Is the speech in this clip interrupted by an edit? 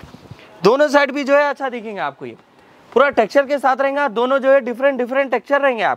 no; 0 cuts

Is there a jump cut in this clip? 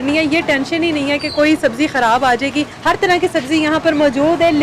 yes; 1 cut; at 2.7 s

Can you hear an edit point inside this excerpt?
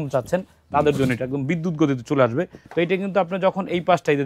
yes; 1 cut; at 2.6 s

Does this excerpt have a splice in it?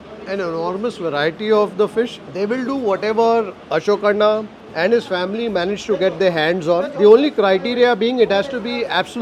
no; 0 cuts

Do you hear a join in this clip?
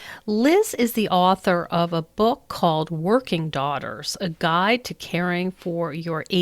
no; 0 cuts

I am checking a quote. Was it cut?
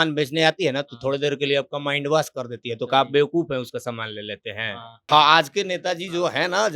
yes; 1 cut; at 4.9 s

